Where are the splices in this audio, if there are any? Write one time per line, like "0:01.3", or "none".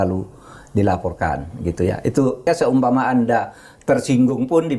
0:02.5